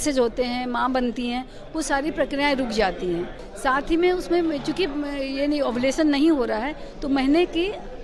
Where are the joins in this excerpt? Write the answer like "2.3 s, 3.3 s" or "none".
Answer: 3.4 s

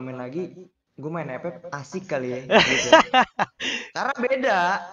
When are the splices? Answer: none

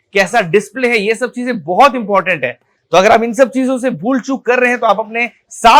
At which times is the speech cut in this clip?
none

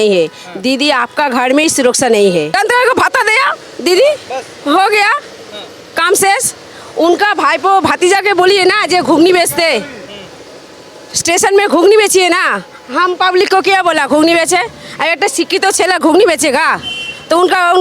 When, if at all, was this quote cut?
2.5 s

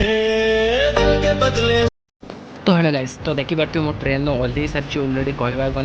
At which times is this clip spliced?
none

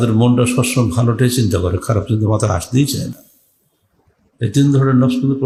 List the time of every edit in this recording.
none

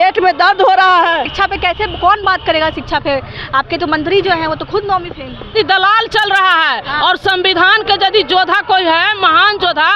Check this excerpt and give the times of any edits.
1.3 s, 5.5 s

